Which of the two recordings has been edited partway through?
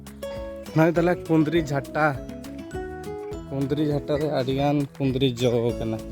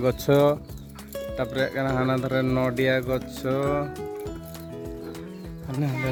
first; 3 cuts; at 0.7 s, 2.2 s, 3.3 s

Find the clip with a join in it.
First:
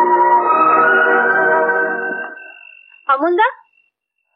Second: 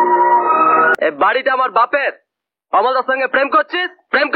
second; 1 cut; at 0.9 s

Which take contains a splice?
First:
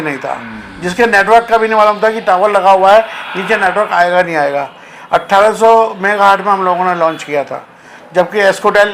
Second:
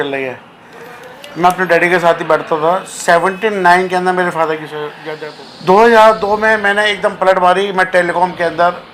second; 1 cut; at 5.0 s

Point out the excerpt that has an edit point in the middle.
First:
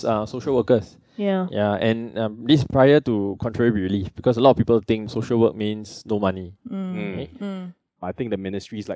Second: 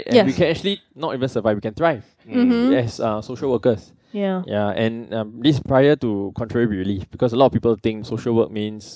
first; 1 cut; at 8.0 s

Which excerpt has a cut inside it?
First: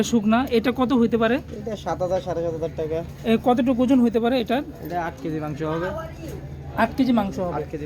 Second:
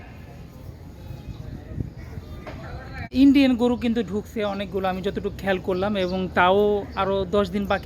second; 1 cut; at 3.1 s

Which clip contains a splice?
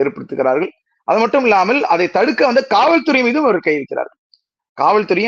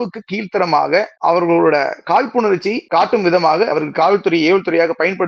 second; 3 cuts; at 1.1 s, 2.8 s, 3.7 s

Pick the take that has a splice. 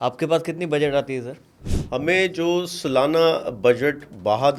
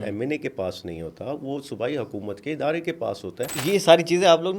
second; 1 cut; at 3.5 s

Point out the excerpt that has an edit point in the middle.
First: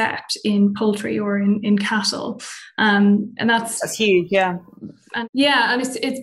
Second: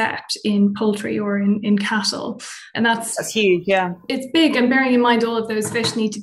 second; 2 cuts; at 2.7 s, 4.0 s

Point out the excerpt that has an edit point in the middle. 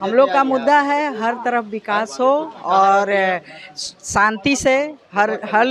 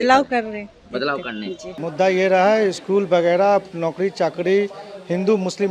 second; 1 cut; at 1.7 s

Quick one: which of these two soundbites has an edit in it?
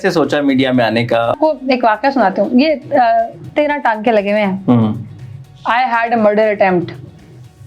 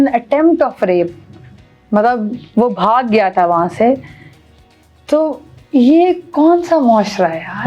first; 1 cut; at 1.4 s

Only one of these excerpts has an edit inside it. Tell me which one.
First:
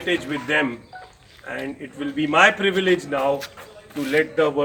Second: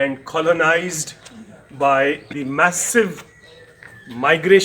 second; 1 cut; at 2.3 s

